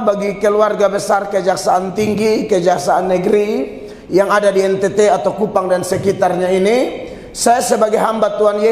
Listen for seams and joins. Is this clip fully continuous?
yes; 0 cuts

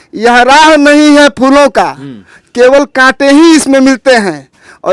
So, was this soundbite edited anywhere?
no; 0 cuts

